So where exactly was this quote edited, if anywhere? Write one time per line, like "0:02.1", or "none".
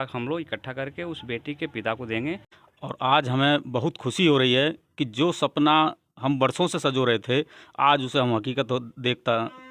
0:02.5